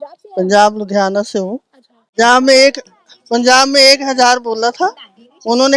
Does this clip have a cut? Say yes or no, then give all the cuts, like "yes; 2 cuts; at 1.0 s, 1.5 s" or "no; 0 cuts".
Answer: yes; 1 cut; at 2.0 s